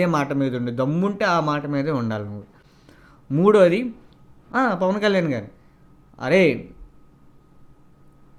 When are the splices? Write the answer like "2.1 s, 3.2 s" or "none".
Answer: none

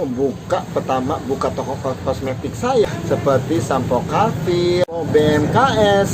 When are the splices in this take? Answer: 2.8 s, 4.8 s

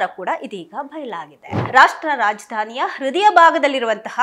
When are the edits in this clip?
1.5 s

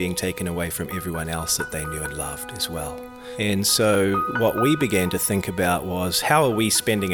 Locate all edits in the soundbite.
3.2 s

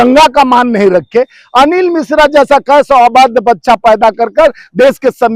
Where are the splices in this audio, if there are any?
none

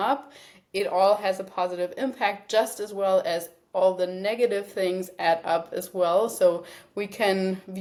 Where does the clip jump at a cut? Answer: none

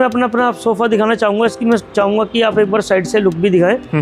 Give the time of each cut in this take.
none

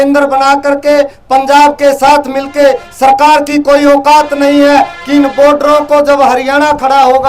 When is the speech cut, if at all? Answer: none

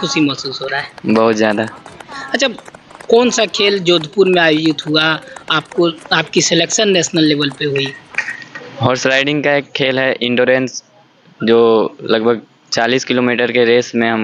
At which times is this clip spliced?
none

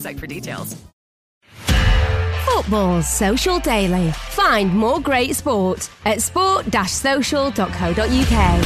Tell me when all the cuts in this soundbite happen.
1.6 s

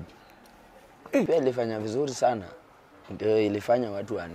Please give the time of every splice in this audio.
1.3 s

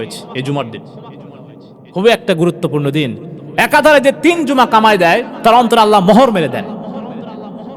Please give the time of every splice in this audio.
none

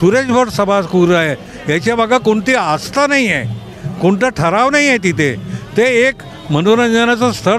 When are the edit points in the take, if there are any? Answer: none

